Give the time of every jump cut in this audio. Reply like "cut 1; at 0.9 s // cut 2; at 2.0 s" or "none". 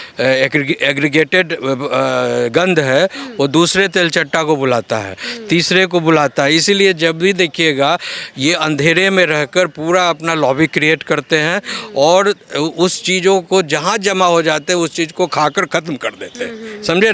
none